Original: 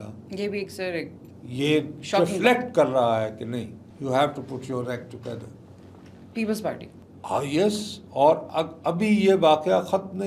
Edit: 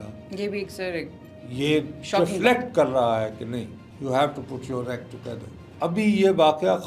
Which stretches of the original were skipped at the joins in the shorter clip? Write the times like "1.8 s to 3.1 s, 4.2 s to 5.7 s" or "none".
5.7 s to 8.7 s